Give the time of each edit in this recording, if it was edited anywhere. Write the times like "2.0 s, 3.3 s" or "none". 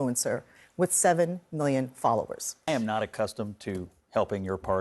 2.6 s